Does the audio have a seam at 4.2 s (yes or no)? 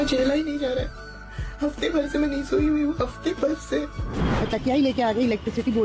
yes